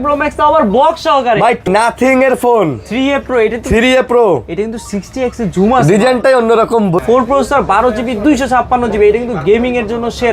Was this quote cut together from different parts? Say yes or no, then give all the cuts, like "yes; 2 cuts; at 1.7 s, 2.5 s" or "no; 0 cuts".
yes; 2 cuts; at 1.6 s, 7.0 s